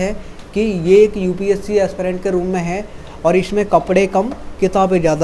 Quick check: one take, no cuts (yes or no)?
yes